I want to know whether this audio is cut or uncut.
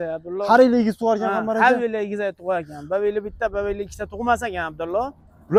uncut